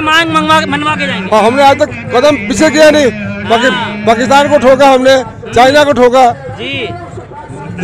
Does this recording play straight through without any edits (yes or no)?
yes